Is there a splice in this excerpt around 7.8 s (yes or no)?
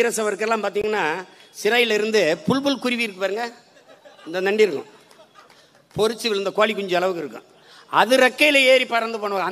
no